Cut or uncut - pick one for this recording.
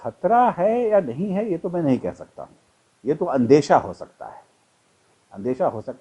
uncut